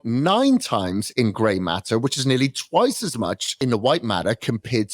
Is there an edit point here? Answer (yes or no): yes